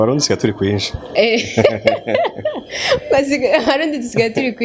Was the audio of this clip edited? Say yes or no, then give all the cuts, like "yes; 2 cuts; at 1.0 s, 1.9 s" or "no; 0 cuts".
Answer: no; 0 cuts